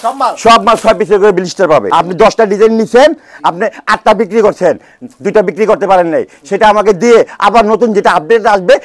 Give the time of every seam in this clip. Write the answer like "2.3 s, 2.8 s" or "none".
1.9 s

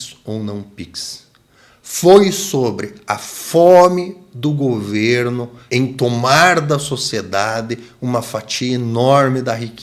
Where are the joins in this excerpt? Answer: none

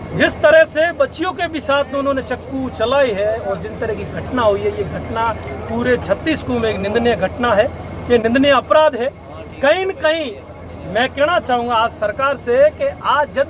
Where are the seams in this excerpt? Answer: none

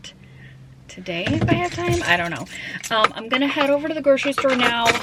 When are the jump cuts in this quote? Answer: none

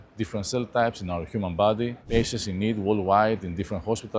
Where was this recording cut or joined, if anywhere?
2.0 s

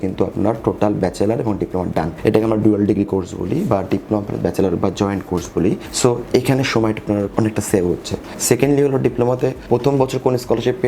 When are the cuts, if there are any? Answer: 2.1 s, 5.9 s, 7.3 s, 8.3 s, 9.6 s

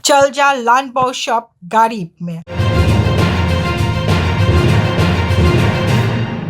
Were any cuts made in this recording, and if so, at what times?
2.6 s

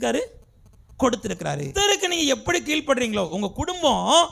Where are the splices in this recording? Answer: 1.7 s

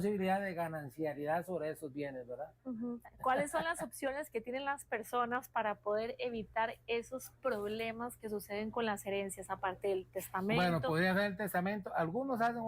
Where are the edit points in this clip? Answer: 3.1 s

